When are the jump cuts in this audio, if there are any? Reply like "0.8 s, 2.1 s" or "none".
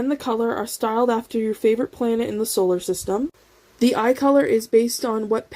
3.4 s